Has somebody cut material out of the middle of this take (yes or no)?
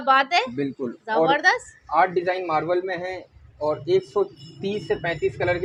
no